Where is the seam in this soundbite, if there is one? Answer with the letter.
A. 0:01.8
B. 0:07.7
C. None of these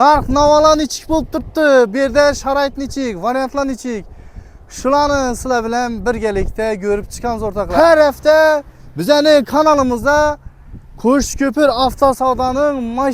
B